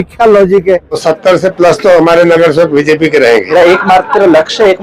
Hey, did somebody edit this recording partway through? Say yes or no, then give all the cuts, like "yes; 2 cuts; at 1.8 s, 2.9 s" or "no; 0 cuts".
yes; 2 cuts; at 1.0 s, 3.5 s